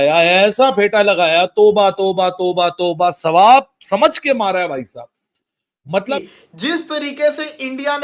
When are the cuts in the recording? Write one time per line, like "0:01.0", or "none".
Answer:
0:06.1